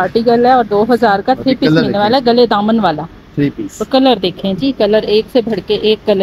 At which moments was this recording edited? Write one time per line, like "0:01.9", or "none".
none

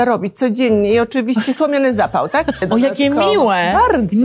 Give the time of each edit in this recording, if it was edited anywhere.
0:02.6

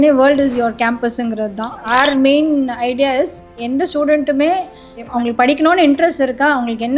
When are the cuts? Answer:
0:01.8
0:05.1

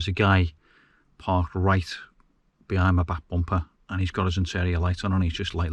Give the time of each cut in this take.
none

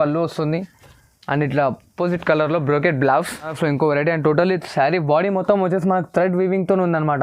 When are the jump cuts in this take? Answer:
0:03.5

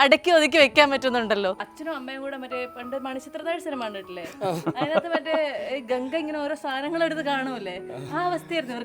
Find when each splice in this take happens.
0:01.7

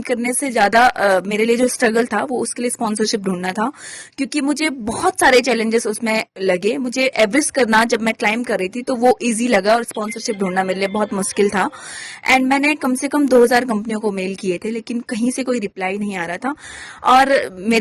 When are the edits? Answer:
none

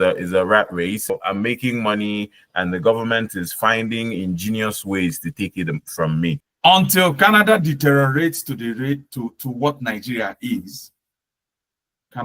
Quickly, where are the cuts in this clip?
0:01.1
0:06.5

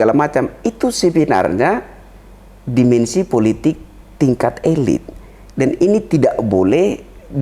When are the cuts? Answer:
none

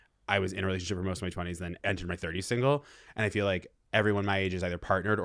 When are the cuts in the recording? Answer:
0:01.8

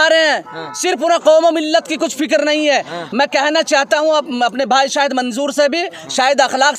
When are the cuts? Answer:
none

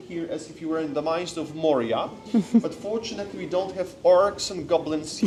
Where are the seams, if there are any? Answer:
none

